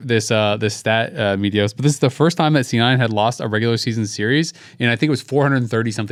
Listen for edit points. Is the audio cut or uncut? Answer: uncut